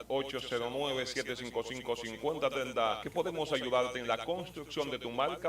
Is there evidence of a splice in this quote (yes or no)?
yes